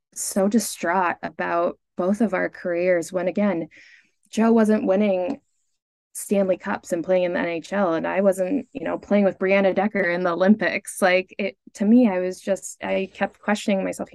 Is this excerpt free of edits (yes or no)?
yes